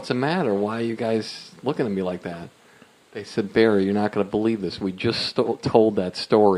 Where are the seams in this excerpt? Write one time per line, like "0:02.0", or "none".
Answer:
none